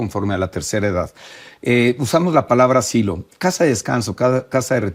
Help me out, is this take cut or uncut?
uncut